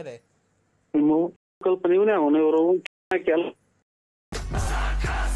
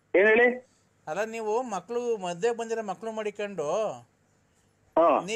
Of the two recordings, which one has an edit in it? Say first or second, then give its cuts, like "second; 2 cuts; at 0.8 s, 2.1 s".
first; 1 cut; at 4.2 s